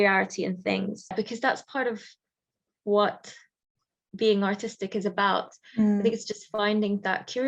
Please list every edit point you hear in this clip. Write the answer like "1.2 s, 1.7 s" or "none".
1.1 s

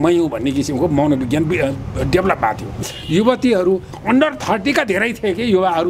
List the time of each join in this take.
2.8 s

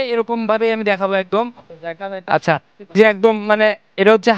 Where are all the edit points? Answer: 2.9 s

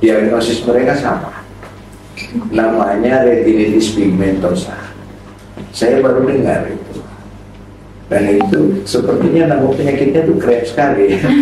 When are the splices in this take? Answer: none

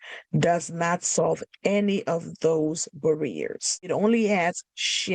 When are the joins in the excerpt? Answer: 3.9 s

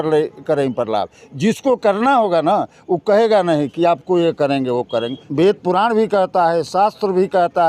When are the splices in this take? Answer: 5.2 s

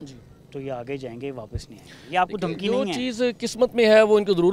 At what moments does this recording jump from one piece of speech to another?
none

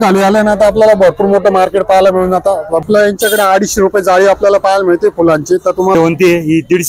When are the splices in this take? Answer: 2.8 s, 5.9 s

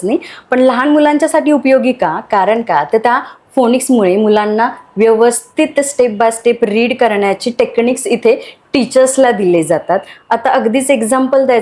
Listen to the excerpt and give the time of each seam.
none

